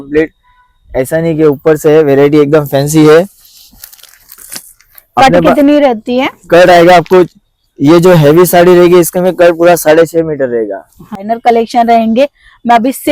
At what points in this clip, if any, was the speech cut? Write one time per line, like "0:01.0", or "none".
0:11.2